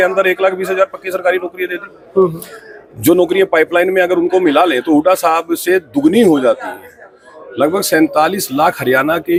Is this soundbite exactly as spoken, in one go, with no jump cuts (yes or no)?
yes